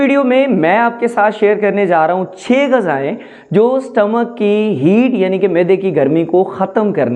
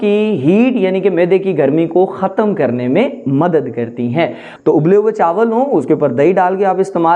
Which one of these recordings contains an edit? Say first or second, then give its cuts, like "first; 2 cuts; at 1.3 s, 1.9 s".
second; 1 cut; at 4.4 s